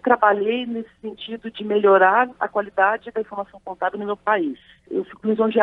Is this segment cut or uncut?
uncut